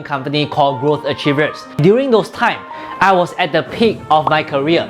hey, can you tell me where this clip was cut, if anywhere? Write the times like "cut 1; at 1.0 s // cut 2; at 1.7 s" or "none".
cut 1; at 1.6 s